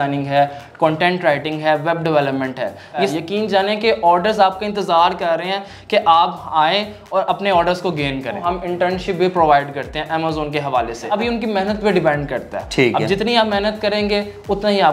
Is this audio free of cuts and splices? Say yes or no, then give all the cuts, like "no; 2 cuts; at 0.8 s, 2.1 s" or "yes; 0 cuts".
no; 3 cuts; at 3.1 s, 8.4 s, 11.0 s